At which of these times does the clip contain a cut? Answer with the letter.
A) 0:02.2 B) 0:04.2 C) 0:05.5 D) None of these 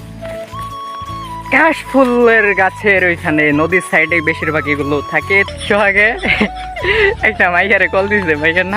C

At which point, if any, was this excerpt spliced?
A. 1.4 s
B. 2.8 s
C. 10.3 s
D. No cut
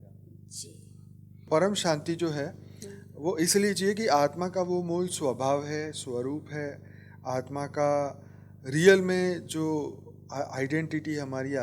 A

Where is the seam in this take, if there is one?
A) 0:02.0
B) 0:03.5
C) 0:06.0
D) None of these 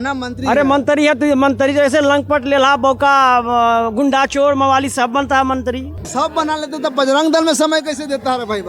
C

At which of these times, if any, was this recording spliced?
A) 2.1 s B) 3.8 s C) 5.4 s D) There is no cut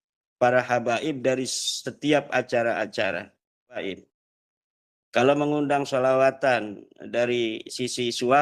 B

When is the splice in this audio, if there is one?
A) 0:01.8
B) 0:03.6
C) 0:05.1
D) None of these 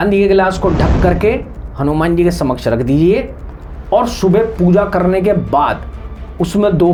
D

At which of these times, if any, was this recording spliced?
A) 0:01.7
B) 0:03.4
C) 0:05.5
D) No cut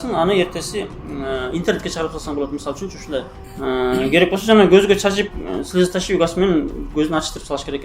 B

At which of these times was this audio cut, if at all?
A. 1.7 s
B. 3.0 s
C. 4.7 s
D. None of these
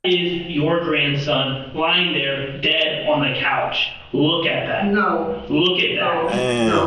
D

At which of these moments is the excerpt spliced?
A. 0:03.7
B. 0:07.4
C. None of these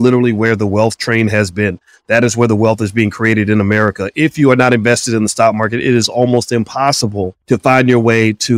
B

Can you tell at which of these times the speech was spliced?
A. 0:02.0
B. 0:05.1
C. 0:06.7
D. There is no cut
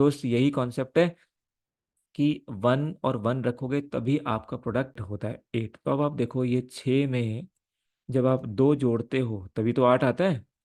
B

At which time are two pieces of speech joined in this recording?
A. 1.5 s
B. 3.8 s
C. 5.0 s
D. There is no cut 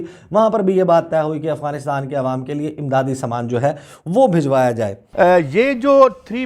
D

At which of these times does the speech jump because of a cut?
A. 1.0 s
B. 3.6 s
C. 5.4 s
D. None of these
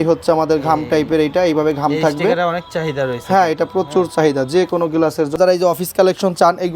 C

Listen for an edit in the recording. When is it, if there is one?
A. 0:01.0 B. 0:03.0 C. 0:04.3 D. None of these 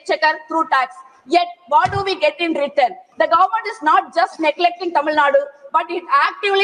B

